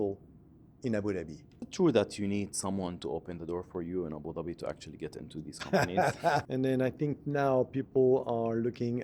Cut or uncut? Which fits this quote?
cut